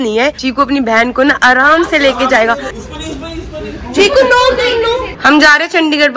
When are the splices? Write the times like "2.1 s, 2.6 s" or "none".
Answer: 2.7 s, 5.1 s